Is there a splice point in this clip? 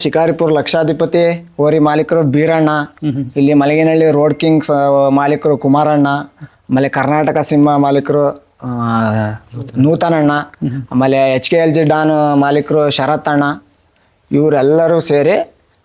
no; 0 cuts

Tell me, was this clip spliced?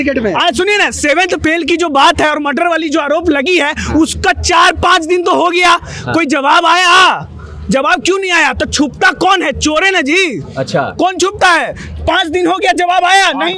no; 0 cuts

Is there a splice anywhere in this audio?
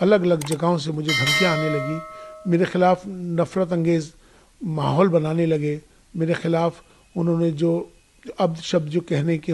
no; 0 cuts

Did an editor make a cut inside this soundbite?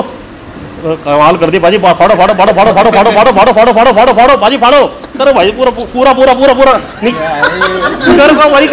yes; 1 cut; at 5.1 s

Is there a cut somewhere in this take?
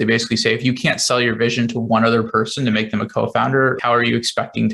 no; 0 cuts

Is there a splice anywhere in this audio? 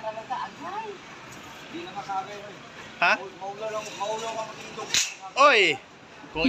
no; 0 cuts

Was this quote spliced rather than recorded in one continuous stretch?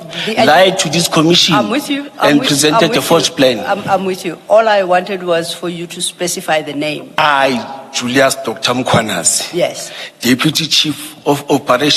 yes; 1 cut; at 7.1 s

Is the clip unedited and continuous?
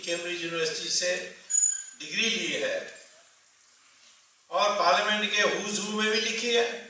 no; 1 cut; at 3.0 s

